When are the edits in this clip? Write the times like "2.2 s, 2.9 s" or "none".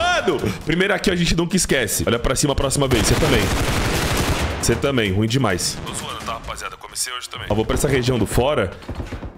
2.0 s, 5.6 s, 7.3 s